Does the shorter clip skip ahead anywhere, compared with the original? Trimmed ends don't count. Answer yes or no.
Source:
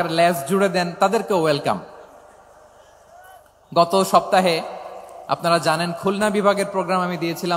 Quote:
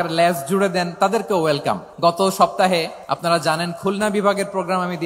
yes